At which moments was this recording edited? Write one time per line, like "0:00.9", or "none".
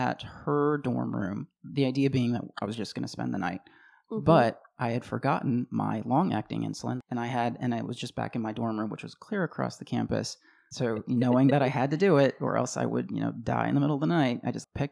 0:01.5
0:07.0
0:10.6